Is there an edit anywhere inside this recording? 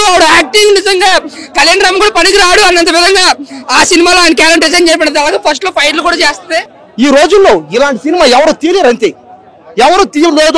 yes; 1 cut; at 6.8 s

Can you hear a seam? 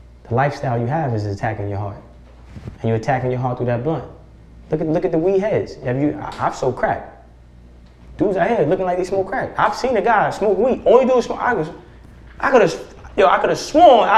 no; 0 cuts

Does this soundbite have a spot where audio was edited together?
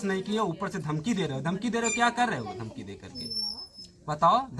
no; 0 cuts

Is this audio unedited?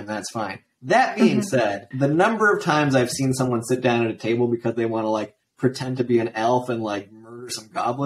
no; 1 cut; at 1.9 s

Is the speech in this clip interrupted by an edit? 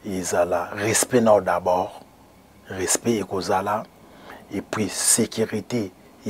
no; 0 cuts

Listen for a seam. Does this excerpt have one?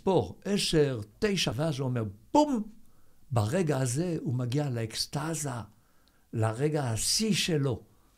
yes; 1 cut; at 1.5 s

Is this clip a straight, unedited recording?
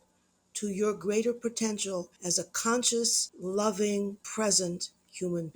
no; 3 cuts; at 2.2 s, 3.3 s, 4.2 s

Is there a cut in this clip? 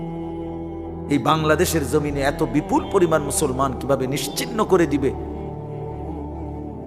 yes; 1 cut; at 0.9 s

